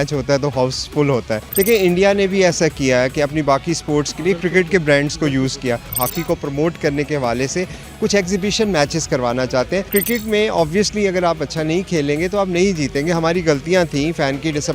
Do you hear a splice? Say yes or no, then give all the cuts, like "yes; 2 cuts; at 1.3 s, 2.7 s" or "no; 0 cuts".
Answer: yes; 3 cuts; at 1.4 s, 5.9 s, 9.9 s